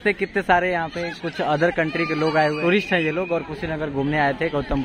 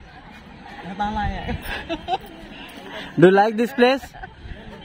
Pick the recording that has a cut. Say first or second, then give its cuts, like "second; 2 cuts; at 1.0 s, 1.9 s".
first; 1 cut; at 2.6 s